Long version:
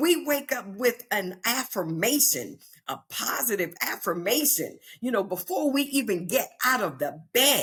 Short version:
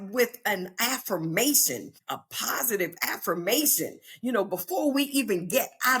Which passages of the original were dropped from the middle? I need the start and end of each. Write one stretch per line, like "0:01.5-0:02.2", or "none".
0:02.6-0:02.7